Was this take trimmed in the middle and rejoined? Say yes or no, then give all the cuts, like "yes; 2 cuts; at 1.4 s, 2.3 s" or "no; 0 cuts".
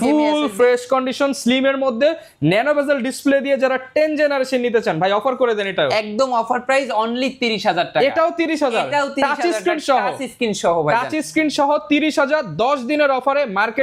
no; 0 cuts